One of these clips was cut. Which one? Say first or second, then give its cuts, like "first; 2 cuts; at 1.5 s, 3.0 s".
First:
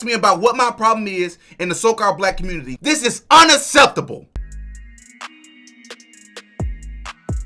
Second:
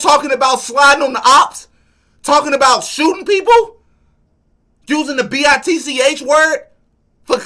first; 2 cuts; at 2.7 s, 4.5 s